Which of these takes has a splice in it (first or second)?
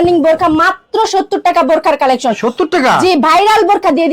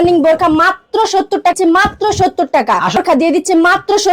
second